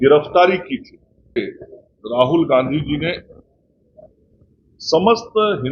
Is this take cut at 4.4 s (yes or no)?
no